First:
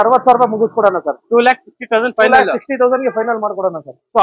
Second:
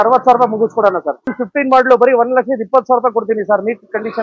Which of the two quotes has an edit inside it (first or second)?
second